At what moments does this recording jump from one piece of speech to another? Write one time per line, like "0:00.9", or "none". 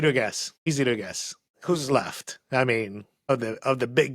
0:00.7
0:03.1